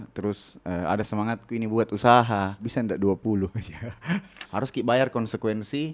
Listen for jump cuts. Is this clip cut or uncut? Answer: cut